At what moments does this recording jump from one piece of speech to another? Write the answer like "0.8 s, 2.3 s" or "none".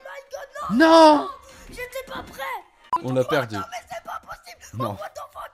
2.9 s